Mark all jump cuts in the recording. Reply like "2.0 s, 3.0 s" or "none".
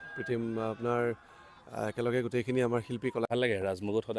3.3 s

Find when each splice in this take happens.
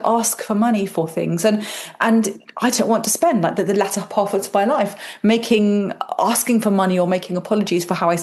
none

